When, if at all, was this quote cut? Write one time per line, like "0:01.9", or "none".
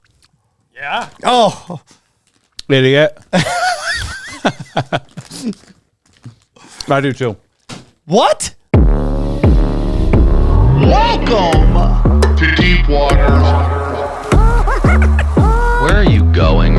0:08.5